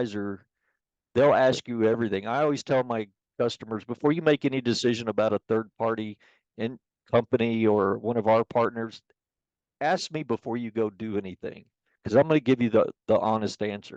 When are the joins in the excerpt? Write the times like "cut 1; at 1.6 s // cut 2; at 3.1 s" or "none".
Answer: none